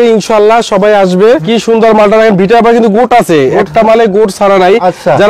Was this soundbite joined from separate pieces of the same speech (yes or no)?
yes